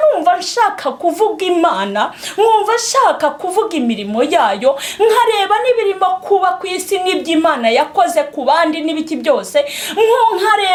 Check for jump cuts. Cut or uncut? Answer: uncut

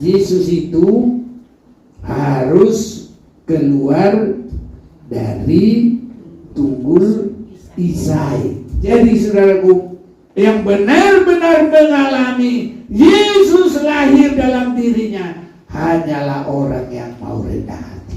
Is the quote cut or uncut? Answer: cut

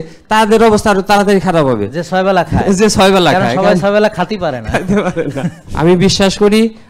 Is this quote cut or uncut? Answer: cut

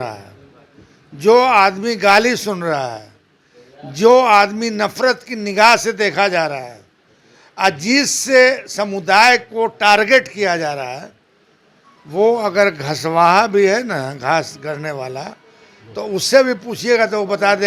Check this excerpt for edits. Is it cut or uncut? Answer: uncut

